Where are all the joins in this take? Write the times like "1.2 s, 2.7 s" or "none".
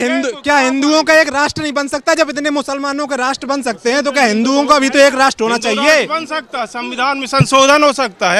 none